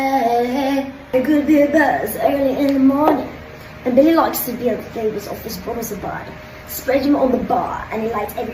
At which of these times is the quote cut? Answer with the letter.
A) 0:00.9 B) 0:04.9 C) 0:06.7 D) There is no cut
A